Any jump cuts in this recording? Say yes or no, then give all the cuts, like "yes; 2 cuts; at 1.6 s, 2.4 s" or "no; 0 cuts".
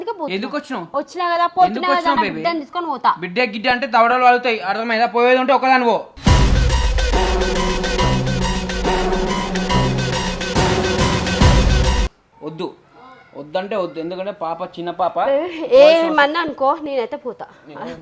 yes; 1 cut; at 12.2 s